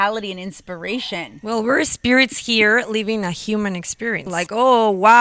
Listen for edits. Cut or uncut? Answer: cut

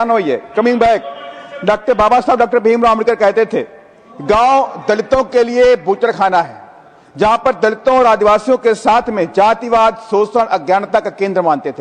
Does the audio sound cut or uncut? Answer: uncut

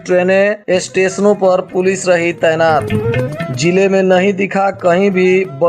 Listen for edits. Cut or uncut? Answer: uncut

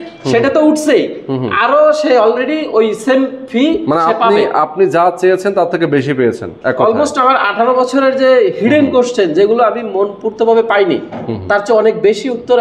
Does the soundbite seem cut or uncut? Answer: uncut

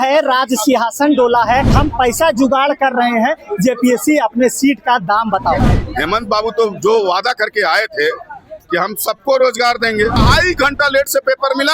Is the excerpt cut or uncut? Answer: cut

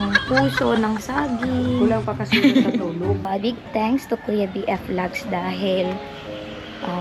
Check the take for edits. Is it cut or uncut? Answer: cut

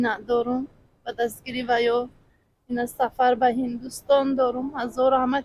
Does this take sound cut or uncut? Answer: uncut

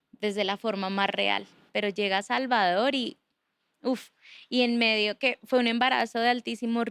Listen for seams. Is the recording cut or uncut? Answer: cut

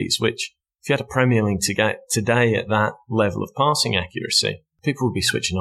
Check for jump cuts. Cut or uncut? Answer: cut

